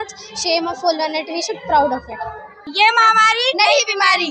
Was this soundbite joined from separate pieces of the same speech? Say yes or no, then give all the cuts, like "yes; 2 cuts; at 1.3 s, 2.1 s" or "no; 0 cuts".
yes; 1 cut; at 2.7 s